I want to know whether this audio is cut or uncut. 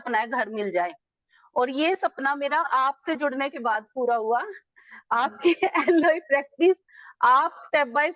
uncut